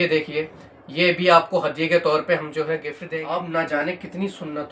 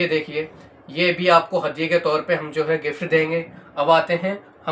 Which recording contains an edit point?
first; 1 cut; at 2.9 s

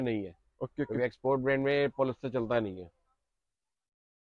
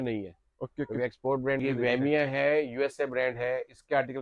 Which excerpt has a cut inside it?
second; 1 cut; at 1.6 s

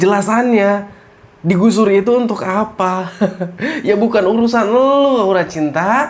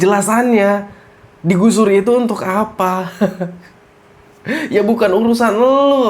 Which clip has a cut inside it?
first; 1 cut; at 3.5 s

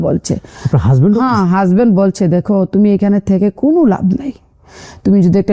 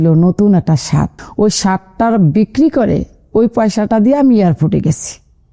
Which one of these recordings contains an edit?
second; 1 cut; at 1.2 s

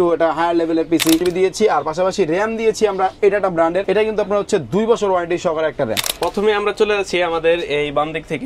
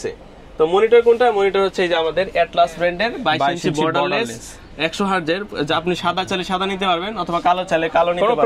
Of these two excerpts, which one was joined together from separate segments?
first; 3 cuts; at 1.2 s, 3.8 s, 6.1 s

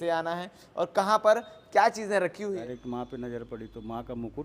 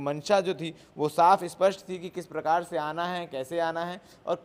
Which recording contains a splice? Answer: first; 1 cut; at 2.5 s

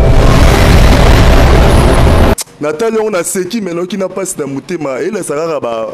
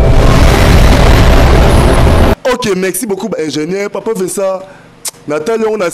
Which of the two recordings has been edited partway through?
first; 1 cut; at 2.4 s

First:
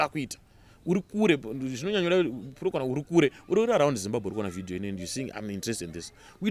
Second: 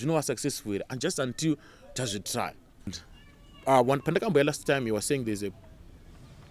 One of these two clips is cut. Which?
second; 1 cut; at 3.0 s

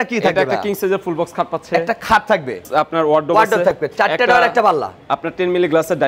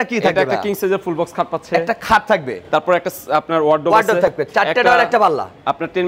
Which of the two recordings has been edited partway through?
first; 1 cut; at 2.6 s

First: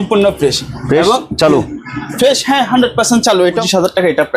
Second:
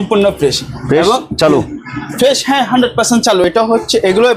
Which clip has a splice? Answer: first; 1 cut; at 3.4 s

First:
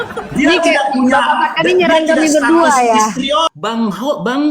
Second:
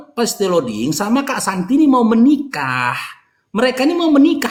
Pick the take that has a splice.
first; 1 cut; at 3.5 s

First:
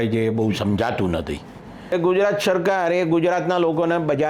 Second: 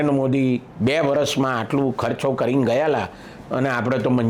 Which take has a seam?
first; 1 cut; at 1.9 s

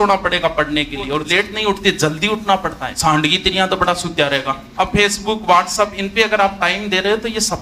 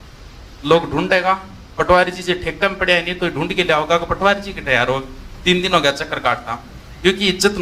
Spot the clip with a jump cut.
first; 3 cuts; at 1.2 s, 2.9 s, 4.6 s

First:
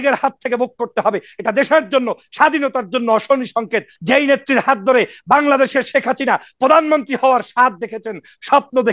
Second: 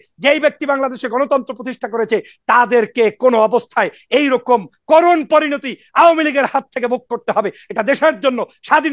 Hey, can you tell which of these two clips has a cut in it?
first; 1 cut; at 3.9 s

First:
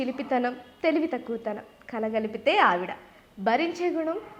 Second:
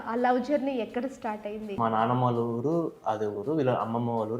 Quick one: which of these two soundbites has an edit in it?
second; 1 cut; at 1.7 s

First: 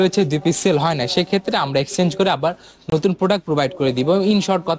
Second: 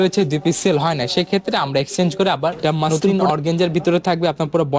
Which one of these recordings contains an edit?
second; 1 cut; at 2.9 s

